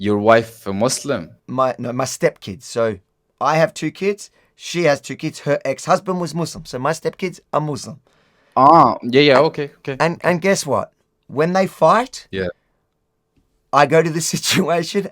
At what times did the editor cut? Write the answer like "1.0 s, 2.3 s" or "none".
1.3 s